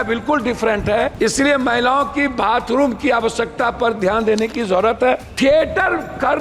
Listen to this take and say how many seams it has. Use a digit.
2